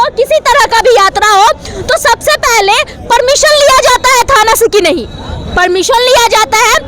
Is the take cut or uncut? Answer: uncut